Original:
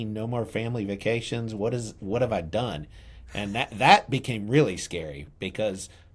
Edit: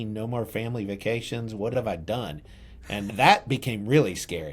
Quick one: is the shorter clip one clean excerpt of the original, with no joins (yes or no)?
no